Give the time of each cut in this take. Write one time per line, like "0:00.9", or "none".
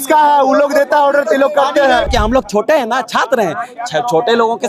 0:02.1